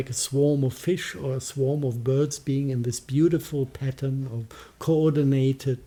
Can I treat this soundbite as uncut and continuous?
yes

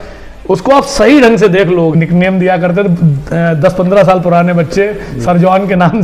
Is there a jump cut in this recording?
yes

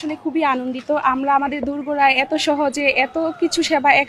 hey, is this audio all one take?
yes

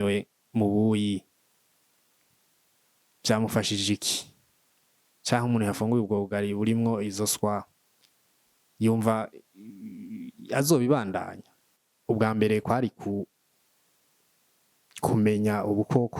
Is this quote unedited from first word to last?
no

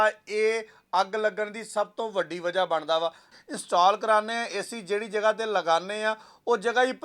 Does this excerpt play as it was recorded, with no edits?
no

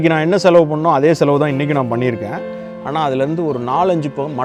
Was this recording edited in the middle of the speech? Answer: no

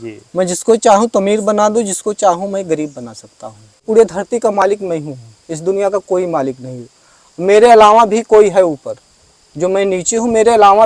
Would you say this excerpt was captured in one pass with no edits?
no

